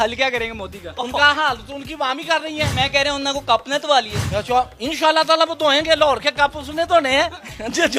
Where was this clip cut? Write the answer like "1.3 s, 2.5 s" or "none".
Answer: 1.0 s, 2.7 s